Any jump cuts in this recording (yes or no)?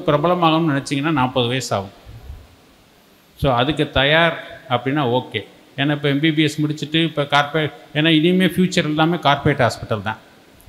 no